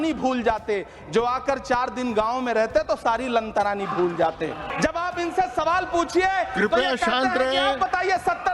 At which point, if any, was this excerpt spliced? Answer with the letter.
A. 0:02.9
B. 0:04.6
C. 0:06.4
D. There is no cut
B